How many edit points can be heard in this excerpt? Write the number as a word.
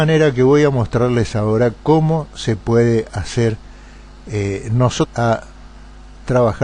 zero